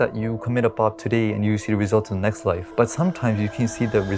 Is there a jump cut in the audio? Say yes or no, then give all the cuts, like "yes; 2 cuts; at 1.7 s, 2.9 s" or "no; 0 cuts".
yes; 1 cut; at 2.6 s